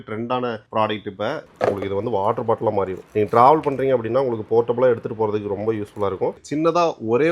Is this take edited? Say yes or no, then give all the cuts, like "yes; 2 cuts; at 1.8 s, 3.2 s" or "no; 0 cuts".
yes; 2 cuts; at 1.4 s, 6.4 s